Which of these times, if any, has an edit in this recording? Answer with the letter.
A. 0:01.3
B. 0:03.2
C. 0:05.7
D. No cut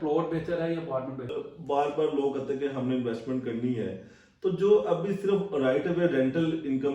A